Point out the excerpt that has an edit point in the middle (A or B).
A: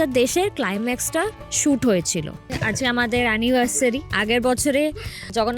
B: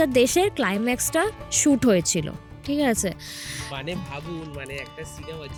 A